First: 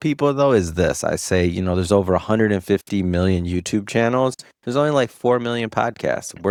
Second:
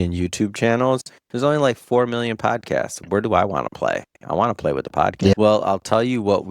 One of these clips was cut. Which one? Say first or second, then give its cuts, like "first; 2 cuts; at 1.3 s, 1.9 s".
second; 1 cut; at 5.3 s